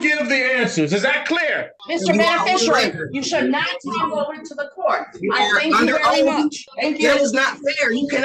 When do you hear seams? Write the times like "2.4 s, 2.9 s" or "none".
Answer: 1.7 s, 6.7 s

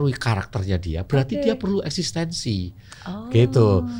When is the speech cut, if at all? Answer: none

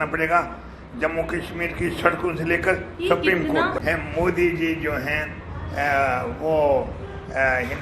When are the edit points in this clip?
3.8 s

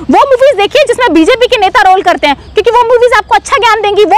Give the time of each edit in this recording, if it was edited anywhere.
none

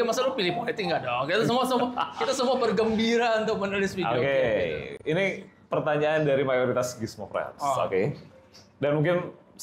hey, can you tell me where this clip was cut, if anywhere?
none

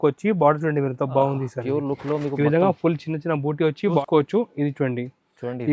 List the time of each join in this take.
4.0 s

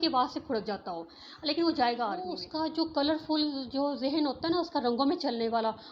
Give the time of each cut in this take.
2.4 s

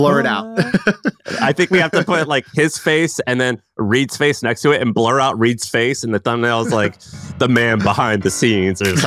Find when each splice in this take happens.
none

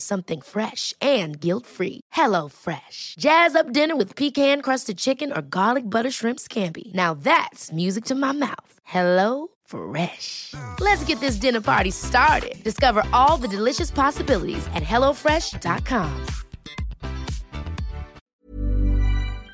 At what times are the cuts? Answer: 18.2 s

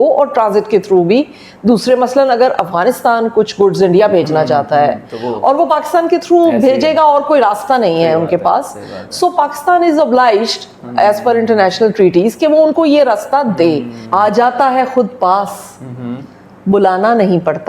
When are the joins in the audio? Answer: 13.9 s

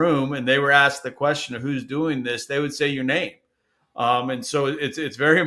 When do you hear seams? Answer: none

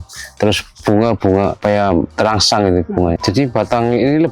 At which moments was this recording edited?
3.2 s

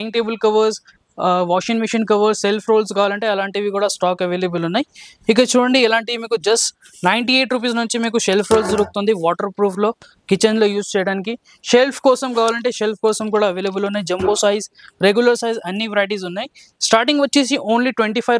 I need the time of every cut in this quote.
none

